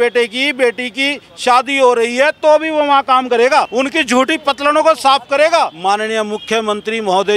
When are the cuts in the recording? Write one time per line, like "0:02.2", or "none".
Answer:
0:03.7
0:05.8